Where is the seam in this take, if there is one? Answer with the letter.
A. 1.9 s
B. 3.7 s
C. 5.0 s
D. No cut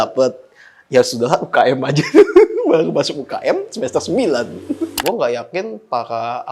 C